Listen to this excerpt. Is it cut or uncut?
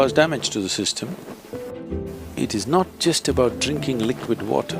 cut